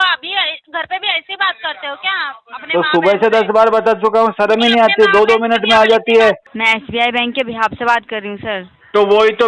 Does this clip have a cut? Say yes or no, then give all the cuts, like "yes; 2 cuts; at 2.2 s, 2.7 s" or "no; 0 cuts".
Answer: yes; 1 cut; at 6.5 s